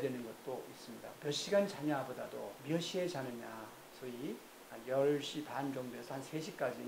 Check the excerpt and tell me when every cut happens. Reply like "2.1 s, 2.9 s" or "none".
1.1 s